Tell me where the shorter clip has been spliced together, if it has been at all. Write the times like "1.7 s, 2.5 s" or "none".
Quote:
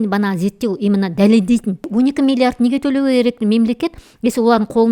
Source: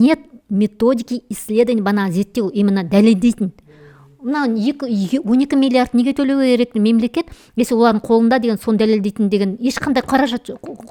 1.9 s